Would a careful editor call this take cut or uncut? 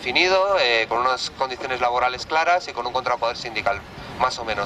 cut